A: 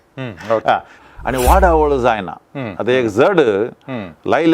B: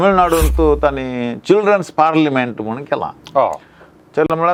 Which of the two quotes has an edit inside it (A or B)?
A